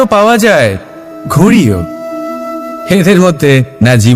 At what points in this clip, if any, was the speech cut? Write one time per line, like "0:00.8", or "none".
none